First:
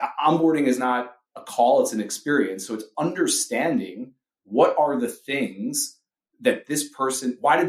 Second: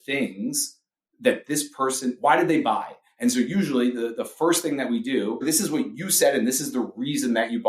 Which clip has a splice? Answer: second; 1 cut; at 5.4 s

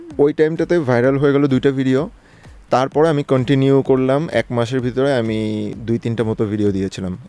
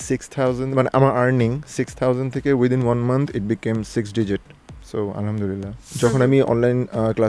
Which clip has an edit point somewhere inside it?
second; 1 cut; at 5.8 s

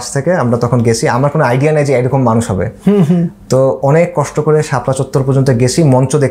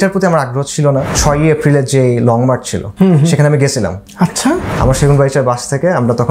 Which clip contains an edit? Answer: second; 3 cuts; at 1.1 s, 2.8 s, 4.0 s

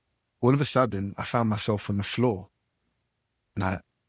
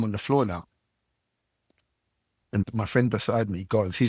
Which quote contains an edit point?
second; 1 cut; at 2.7 s

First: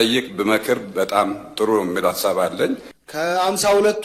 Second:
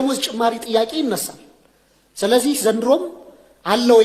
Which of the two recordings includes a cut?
first; 1 cut; at 3.0 s

